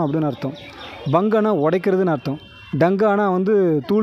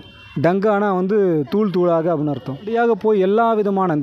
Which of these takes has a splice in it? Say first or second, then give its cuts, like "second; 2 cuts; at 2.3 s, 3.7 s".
second; 1 cut; at 2.7 s